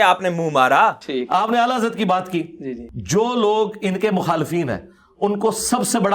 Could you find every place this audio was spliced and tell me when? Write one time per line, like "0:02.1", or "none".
none